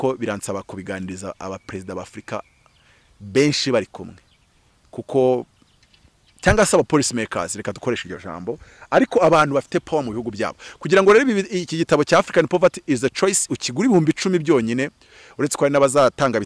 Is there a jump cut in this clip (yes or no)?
no